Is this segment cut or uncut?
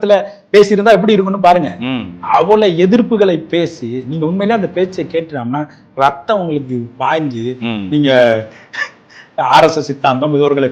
cut